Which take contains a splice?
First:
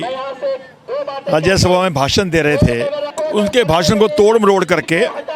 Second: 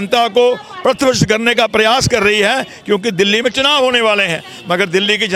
first; 1 cut; at 3.1 s

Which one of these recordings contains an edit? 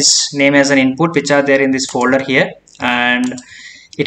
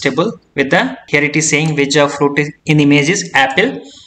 second; 2 cuts; at 1.0 s, 2.6 s

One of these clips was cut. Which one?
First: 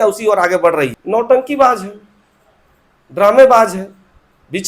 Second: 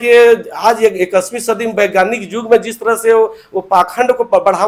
first; 1 cut; at 1.0 s

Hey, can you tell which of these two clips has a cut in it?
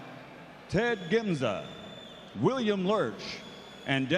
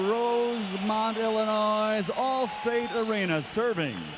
first; 1 cut; at 1.4 s

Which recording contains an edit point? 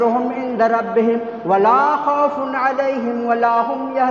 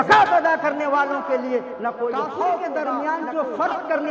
second; 1 cut; at 2.7 s

